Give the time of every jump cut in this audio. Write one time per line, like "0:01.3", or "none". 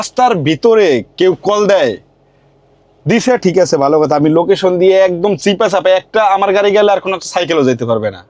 none